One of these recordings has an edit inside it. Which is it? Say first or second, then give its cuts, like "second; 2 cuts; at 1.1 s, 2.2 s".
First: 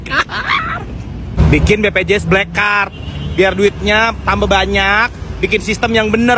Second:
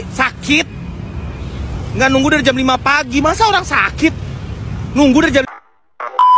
second; 1 cut; at 5.5 s